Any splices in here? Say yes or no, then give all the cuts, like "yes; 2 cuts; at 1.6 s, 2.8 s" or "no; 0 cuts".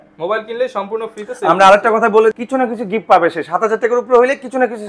yes; 1 cut; at 2.4 s